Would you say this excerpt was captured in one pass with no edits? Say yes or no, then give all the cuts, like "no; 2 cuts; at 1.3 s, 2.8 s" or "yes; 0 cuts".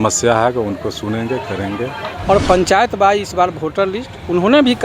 no; 1 cut; at 2.1 s